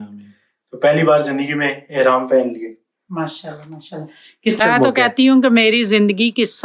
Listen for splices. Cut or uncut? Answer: cut